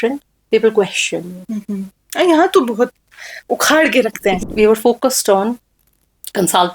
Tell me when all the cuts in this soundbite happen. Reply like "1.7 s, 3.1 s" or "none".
2.0 s, 4.4 s